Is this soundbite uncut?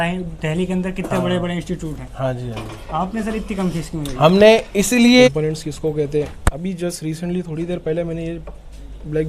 no; 1 cut; at 5.4 s

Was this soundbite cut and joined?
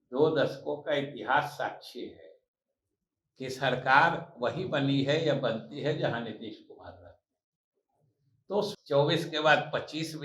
yes; 1 cut; at 8.7 s

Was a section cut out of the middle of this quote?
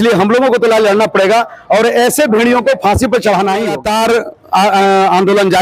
yes; 1 cut; at 3.8 s

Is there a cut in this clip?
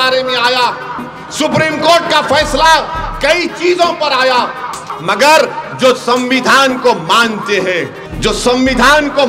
yes; 2 cuts; at 4.9 s, 8.0 s

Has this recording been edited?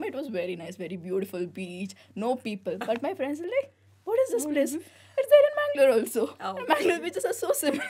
no; 0 cuts

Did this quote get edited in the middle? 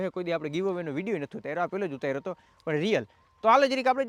no; 0 cuts

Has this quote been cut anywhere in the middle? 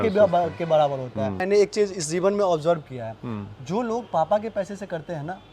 yes; 1 cut; at 1.4 s

